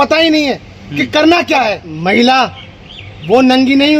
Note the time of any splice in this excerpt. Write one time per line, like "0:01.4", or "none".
0:01.9